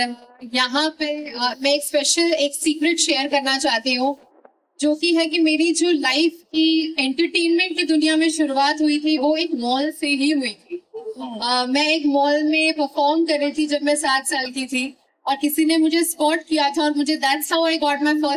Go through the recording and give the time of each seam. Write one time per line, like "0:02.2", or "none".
none